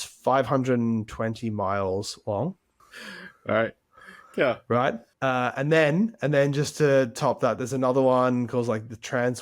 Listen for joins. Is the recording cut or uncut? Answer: cut